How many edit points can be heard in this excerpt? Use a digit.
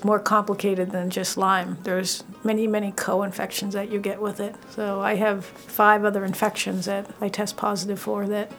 3